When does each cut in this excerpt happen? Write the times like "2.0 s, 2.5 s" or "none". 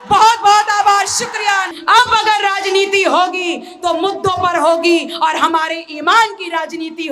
1.7 s